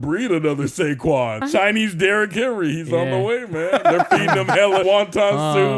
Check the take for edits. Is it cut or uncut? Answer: cut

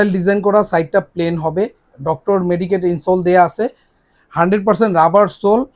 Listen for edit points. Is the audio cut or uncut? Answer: uncut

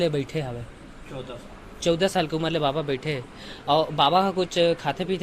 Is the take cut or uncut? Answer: uncut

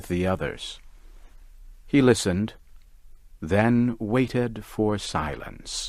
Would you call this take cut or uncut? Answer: cut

